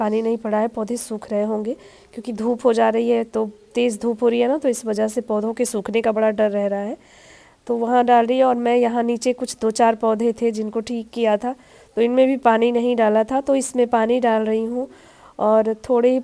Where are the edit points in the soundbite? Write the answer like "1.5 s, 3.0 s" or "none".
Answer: none